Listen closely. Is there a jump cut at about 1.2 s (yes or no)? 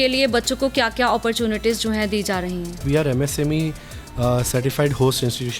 no